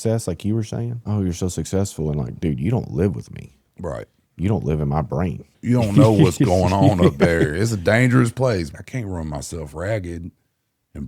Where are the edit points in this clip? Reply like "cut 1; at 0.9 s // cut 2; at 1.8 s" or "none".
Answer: cut 1; at 1.0 s // cut 2; at 5.5 s // cut 3; at 8.7 s

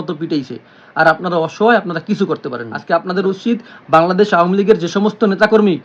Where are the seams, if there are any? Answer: cut 1; at 2.7 s

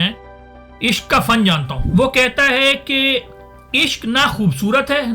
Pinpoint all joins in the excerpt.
cut 1; at 1.7 s

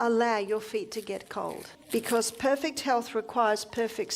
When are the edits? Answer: cut 1; at 1.7 s

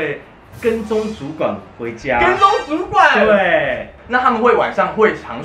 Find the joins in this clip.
none

